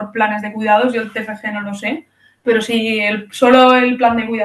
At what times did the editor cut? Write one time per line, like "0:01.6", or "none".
none